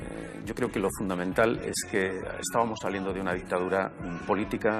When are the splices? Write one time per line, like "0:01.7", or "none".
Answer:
none